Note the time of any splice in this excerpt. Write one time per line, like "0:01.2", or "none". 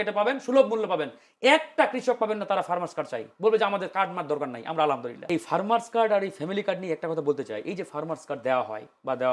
0:05.1